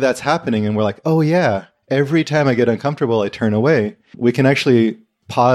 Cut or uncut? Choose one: uncut